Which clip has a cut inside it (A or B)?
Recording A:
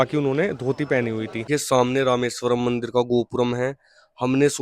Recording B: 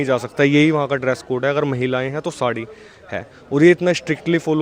A